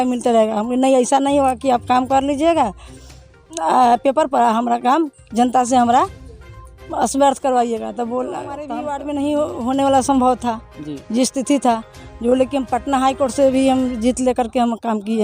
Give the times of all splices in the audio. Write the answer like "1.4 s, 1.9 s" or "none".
8.1 s